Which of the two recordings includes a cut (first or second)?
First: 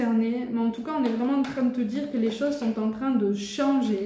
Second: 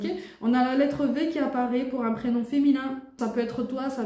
second